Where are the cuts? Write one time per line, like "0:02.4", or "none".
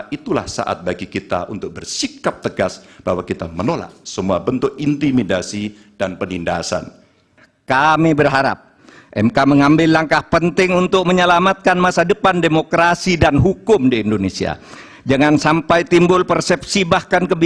0:07.3

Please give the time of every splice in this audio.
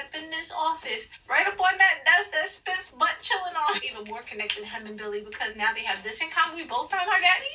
0:01.1
0:03.8

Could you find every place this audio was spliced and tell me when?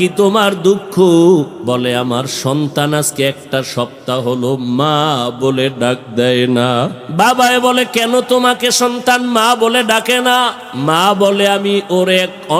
0:01.6
0:07.0
0:10.7

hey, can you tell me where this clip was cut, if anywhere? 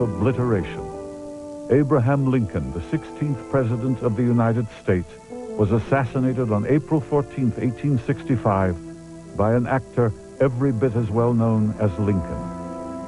0:09.0

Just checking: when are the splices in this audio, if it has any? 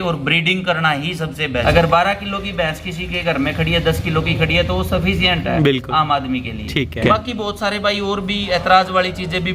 0:01.6
0:07.0

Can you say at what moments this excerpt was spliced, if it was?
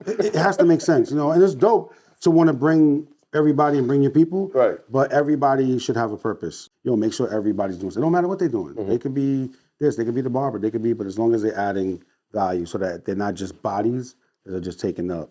0:06.6

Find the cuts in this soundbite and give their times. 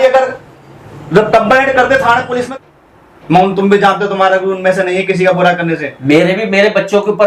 0:02.5

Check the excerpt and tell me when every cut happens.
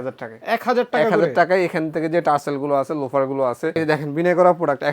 0:03.7

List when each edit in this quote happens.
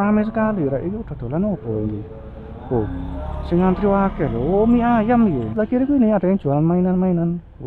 0:05.5

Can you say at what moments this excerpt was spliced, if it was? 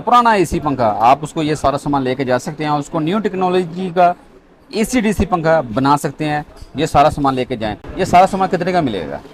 none

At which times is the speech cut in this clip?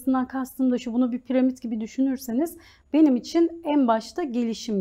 none

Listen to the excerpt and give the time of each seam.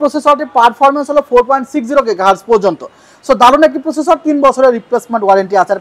none

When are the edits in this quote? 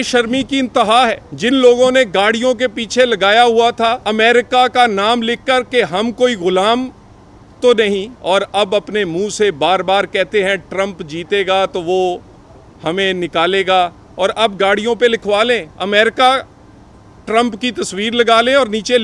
0:01.3
0:04.0
0:08.1
0:15.7

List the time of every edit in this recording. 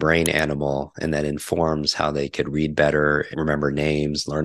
0:03.3

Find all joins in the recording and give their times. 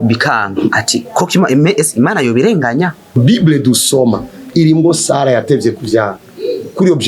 0:03.2

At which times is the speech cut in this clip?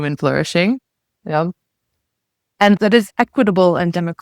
0:02.8

